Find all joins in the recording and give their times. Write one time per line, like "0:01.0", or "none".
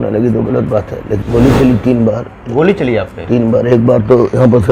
0:01.1